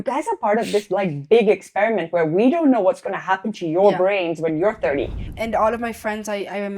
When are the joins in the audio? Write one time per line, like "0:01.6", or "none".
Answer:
0:05.3